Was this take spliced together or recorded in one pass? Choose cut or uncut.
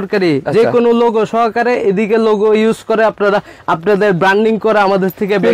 uncut